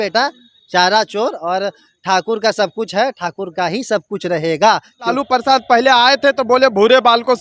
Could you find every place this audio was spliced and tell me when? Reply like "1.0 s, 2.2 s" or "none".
5.2 s